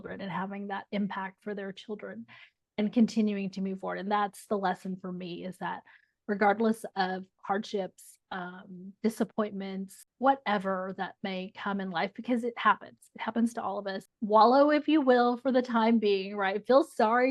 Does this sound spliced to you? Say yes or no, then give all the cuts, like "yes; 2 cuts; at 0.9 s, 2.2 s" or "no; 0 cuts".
yes; 2 cuts; at 10.0 s, 14.1 s